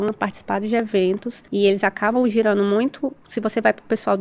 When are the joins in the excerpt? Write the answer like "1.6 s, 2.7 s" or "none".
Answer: 1.4 s, 3.2 s